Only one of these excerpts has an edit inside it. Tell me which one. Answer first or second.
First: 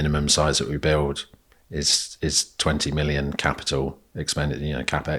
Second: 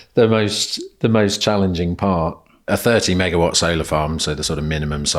second